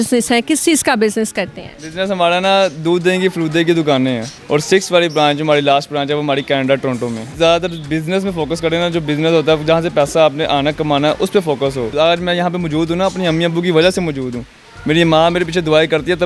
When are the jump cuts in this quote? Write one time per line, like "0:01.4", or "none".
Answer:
0:04.3
0:07.2
0:11.9